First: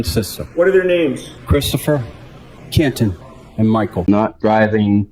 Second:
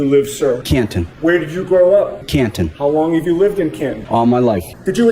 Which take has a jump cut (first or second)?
first